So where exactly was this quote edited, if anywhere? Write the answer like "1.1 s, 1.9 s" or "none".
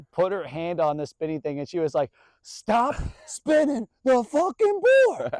none